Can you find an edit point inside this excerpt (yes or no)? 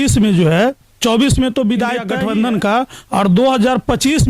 yes